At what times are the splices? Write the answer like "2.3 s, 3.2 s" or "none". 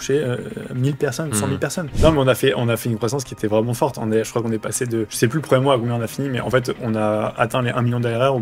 1.9 s, 5.1 s

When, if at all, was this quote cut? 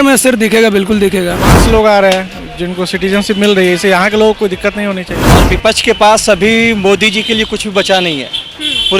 1.6 s, 5.4 s

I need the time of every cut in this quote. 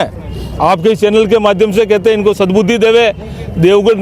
none

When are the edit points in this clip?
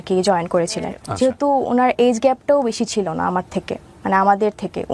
1.0 s

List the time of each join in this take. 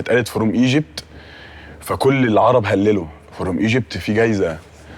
none

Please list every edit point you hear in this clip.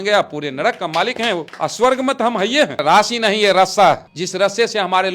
1.5 s, 2.8 s, 4.2 s

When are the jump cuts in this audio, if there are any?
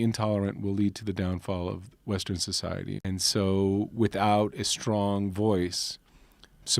3.0 s

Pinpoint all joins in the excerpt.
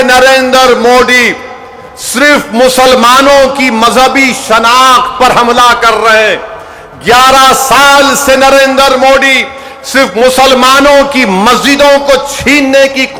none

